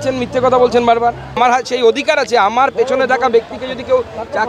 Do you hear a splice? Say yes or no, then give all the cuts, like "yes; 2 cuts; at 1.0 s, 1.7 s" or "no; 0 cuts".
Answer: yes; 1 cut; at 1.4 s